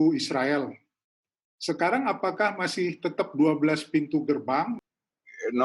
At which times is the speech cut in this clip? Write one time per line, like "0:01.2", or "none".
0:04.8